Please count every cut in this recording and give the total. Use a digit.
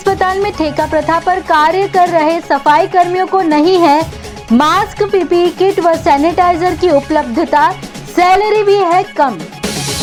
0